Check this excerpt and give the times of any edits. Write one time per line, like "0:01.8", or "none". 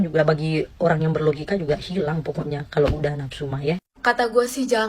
0:03.9